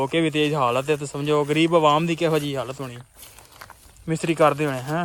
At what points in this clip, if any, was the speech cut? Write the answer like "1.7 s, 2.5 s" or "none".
none